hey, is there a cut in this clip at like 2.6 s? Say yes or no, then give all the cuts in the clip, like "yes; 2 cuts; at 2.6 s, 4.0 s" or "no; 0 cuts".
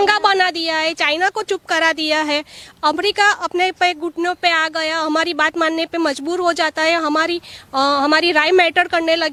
no; 0 cuts